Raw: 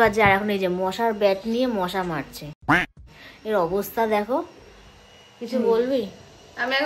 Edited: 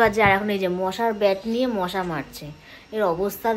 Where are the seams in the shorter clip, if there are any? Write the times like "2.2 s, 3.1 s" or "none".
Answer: 2.5 s